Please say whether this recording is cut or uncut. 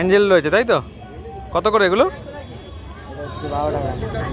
uncut